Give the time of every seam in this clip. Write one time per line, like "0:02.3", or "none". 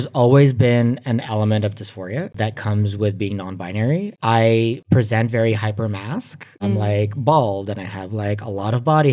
none